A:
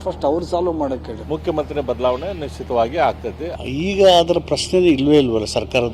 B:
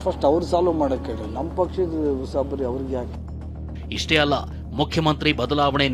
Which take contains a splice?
A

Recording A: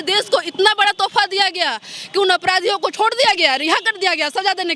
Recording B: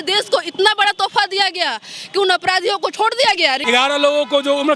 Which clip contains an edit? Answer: B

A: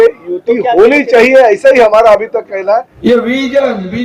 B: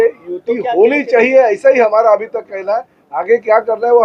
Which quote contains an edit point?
A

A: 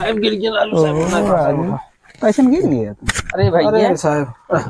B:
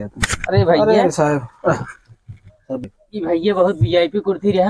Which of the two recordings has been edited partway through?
B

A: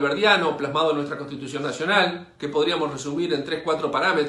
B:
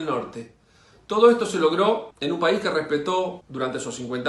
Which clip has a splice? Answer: B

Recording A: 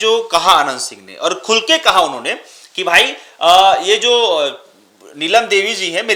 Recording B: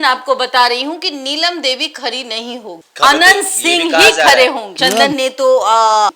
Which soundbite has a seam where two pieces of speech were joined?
B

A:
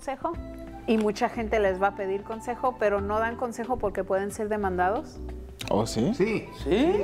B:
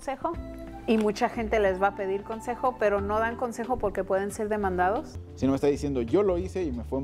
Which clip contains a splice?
B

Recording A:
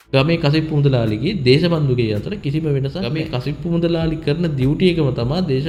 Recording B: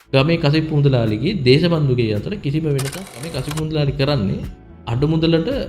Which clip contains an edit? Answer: B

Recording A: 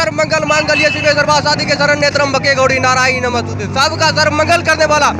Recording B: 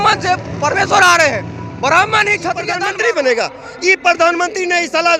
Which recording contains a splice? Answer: B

